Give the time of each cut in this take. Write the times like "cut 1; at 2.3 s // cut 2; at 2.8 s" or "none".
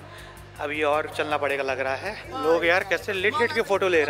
cut 1; at 2.3 s